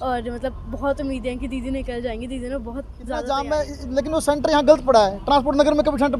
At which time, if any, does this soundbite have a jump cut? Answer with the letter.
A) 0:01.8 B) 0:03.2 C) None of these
B